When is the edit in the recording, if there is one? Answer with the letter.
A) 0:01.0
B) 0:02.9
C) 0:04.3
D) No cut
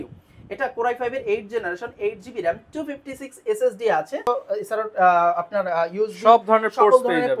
C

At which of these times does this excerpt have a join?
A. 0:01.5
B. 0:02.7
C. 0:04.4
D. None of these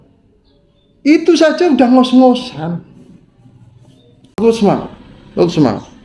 C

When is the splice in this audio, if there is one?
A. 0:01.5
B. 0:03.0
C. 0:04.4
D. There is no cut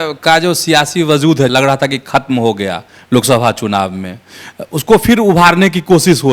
A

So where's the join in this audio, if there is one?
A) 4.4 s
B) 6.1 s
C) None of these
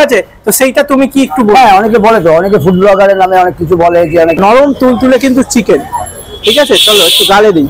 A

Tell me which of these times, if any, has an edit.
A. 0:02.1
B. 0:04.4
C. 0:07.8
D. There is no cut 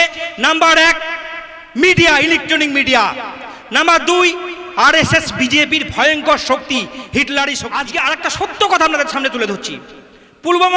C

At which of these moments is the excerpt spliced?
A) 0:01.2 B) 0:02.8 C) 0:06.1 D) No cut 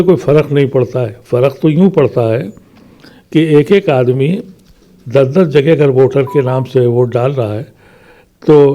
D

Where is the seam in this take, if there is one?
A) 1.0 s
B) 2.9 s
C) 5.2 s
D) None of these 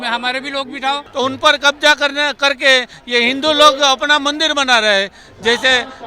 A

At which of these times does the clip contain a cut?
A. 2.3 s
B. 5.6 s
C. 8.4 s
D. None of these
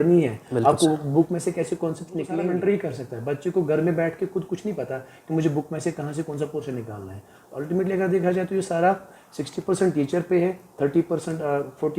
A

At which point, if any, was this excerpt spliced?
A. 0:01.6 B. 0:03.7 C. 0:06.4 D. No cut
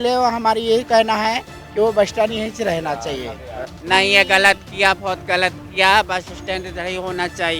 B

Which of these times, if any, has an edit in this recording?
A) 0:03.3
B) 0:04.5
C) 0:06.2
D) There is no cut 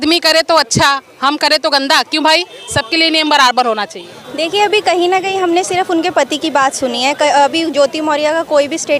D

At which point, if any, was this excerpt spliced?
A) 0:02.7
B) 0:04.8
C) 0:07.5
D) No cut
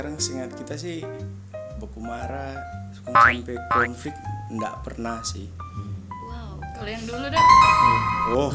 D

